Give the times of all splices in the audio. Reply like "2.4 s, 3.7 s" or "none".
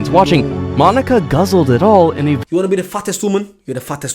2.4 s